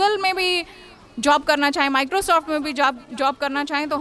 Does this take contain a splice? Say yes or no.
no